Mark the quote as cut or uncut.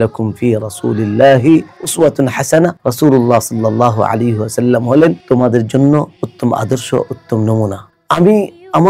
cut